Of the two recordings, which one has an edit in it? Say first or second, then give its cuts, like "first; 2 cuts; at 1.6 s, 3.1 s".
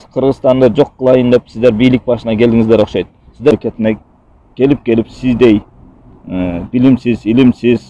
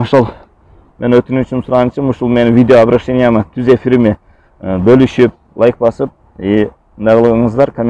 first; 1 cut; at 3.5 s